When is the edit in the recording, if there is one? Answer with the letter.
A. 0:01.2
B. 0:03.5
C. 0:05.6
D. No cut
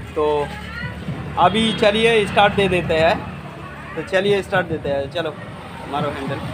D